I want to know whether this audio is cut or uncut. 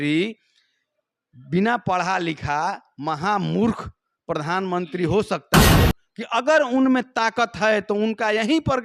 cut